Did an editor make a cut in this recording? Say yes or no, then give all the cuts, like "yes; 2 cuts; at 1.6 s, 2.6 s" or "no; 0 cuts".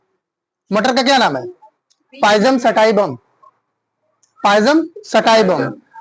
no; 0 cuts